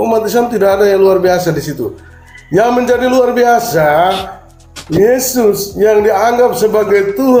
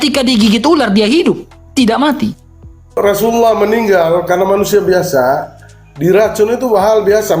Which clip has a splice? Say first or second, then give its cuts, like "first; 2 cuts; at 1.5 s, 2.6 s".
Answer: second; 1 cut; at 3.0 s